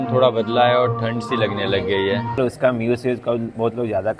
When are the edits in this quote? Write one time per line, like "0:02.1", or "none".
0:02.4